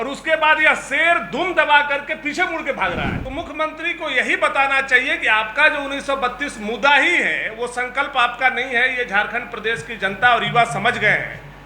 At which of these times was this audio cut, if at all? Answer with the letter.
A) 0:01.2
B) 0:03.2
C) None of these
B